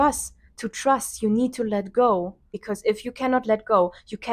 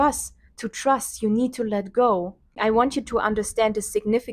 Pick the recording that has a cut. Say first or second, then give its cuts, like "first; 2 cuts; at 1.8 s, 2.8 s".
first; 1 cut; at 2.4 s